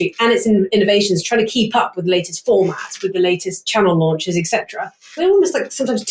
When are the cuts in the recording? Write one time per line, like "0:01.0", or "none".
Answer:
0:05.2